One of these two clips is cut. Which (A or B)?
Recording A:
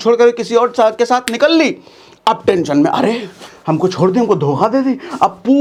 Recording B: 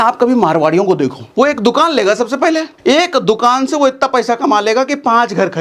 B